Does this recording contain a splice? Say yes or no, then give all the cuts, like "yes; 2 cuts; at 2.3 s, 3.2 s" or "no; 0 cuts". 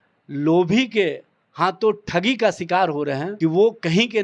yes; 1 cut; at 3.3 s